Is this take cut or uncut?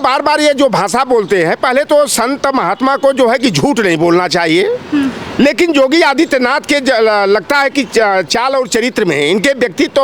uncut